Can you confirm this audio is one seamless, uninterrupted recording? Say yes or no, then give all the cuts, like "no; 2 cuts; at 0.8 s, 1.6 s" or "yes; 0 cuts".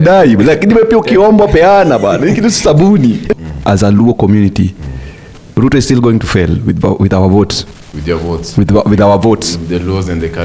no; 1 cut; at 3.3 s